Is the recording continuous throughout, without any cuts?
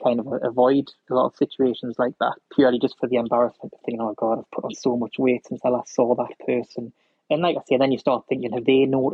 no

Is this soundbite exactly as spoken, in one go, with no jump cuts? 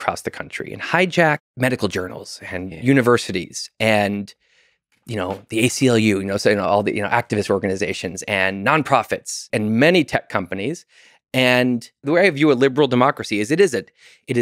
no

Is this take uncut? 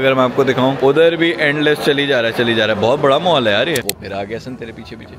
no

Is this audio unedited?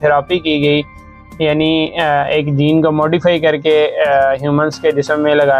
yes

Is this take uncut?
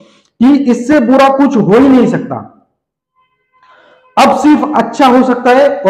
yes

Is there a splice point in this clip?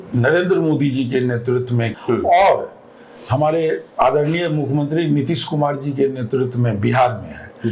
yes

